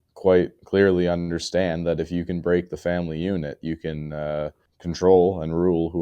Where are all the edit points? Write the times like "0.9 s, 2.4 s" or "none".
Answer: 4.7 s